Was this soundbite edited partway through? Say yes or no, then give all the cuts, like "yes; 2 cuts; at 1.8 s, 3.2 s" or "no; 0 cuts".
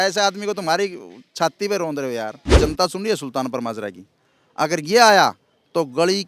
yes; 1 cut; at 2.6 s